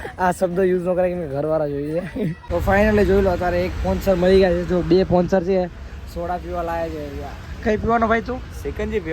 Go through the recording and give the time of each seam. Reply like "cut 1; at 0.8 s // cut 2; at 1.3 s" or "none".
cut 1; at 2.4 s